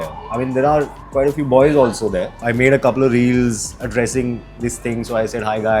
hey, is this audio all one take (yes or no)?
no